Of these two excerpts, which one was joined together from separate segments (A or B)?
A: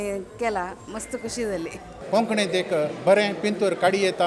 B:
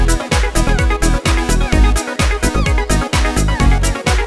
A